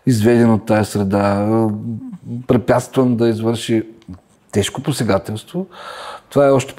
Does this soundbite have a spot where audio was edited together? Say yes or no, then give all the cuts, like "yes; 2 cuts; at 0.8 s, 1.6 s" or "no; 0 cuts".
no; 0 cuts